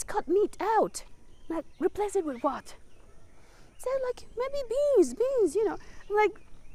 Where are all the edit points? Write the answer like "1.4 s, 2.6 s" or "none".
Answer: none